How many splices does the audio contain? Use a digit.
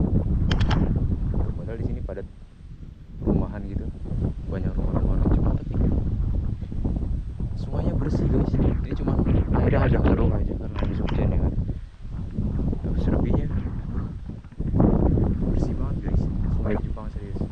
0